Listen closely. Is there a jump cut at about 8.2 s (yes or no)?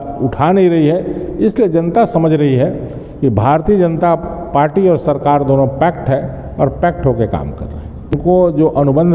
yes